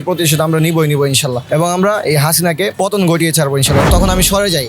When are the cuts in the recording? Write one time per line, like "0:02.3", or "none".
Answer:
0:01.4
0:02.7
0:03.8

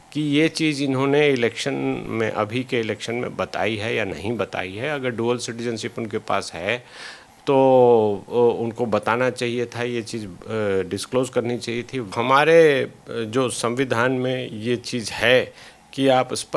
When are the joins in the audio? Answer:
0:12.1

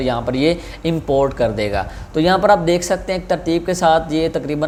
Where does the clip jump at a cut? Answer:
none

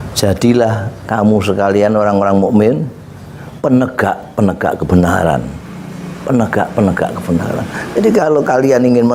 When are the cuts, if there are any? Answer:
none

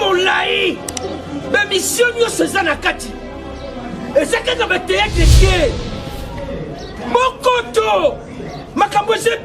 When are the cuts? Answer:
none

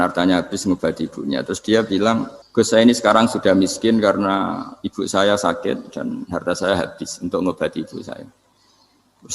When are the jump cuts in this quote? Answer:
0:02.4

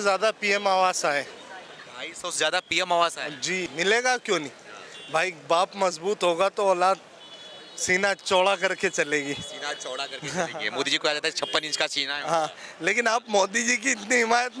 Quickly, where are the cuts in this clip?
0:03.7

